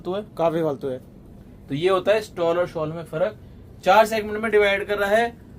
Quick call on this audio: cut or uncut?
uncut